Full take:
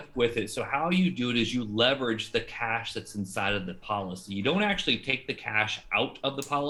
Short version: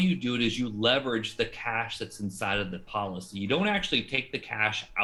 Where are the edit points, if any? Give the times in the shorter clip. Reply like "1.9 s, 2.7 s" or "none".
none